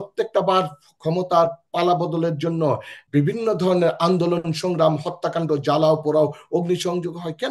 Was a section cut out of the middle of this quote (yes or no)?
yes